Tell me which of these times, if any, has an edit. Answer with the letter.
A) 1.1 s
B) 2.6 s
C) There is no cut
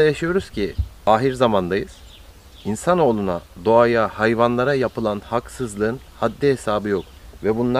A